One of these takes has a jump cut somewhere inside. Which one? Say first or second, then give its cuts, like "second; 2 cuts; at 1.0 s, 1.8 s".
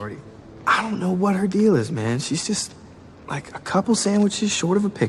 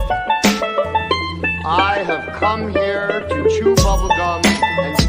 second; 1 cut; at 1.0 s